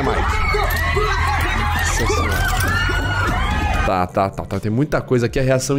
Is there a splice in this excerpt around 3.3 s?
no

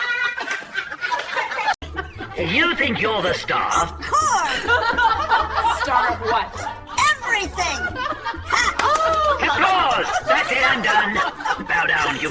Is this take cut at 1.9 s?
yes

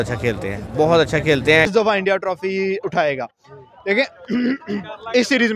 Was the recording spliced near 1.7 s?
yes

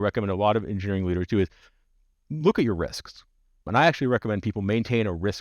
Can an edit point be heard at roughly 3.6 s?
yes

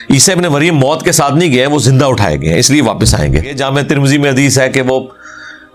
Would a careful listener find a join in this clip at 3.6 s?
yes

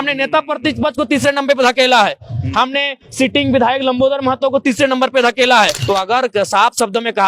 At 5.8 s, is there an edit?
yes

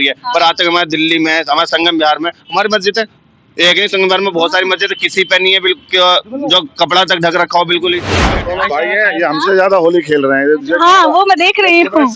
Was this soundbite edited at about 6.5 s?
no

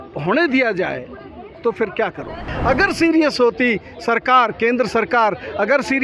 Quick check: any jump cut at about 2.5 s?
yes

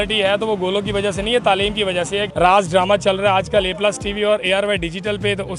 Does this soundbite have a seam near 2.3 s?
yes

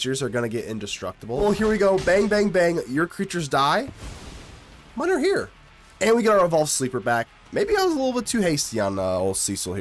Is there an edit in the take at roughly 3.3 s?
no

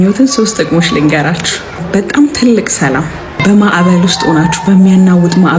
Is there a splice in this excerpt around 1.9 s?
yes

